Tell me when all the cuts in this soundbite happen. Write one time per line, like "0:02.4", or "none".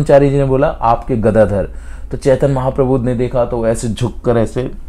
none